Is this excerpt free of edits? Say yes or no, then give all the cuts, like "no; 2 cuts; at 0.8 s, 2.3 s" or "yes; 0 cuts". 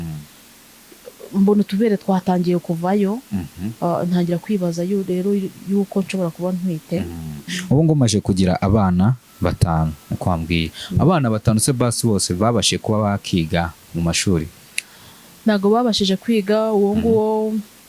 no; 1 cut; at 7.5 s